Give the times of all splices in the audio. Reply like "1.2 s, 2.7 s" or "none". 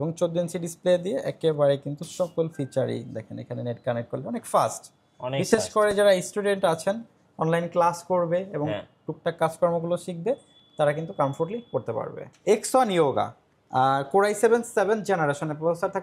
12.3 s